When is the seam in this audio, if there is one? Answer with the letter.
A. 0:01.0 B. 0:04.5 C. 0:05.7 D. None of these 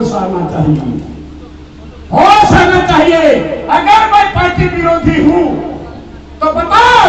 D